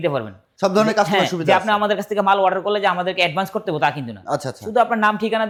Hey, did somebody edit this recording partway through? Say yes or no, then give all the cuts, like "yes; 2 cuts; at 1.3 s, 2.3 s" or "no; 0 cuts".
no; 0 cuts